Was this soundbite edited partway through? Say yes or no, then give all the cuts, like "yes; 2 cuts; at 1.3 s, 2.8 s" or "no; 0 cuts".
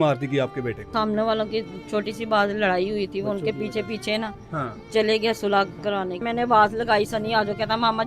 yes; 2 cuts; at 0.9 s, 6.2 s